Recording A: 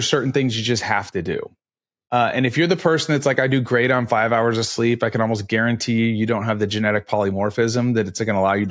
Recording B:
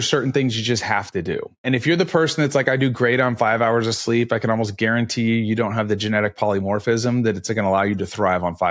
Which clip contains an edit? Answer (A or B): B